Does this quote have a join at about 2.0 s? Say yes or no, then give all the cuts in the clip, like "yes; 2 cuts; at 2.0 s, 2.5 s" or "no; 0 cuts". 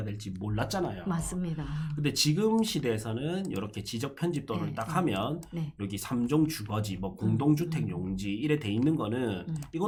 no; 0 cuts